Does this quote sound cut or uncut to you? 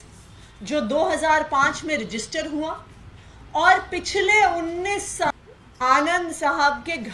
cut